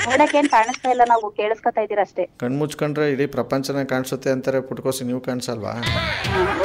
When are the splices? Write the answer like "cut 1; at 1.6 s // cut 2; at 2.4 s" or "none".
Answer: none

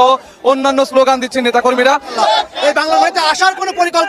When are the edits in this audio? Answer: cut 1; at 2.1 s

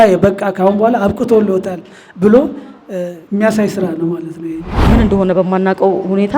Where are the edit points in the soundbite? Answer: cut 1; at 4.9 s

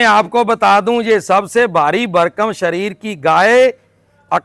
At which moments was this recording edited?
none

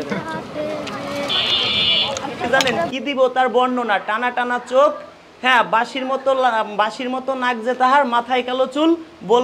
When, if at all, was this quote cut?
cut 1; at 2.5 s

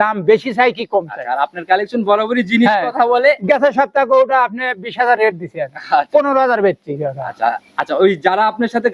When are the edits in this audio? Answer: none

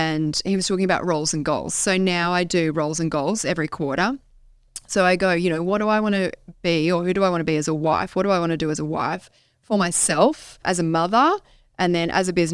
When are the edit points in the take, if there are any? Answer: cut 1; at 10.6 s

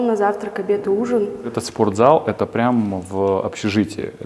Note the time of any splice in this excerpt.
cut 1; at 1.5 s

